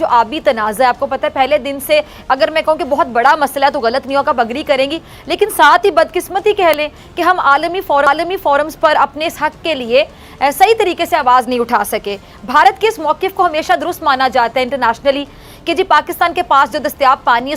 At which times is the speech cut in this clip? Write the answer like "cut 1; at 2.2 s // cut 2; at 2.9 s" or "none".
none